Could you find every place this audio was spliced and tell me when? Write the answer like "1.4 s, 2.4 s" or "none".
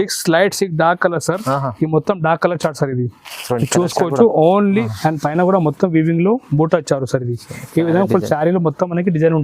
4.9 s